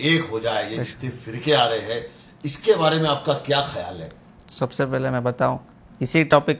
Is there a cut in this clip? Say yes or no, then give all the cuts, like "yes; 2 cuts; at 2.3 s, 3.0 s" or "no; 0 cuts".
no; 0 cuts